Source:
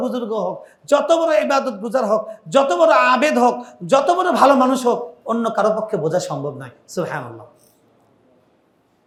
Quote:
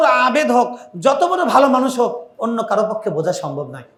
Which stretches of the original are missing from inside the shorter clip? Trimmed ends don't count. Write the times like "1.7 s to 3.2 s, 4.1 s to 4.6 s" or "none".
none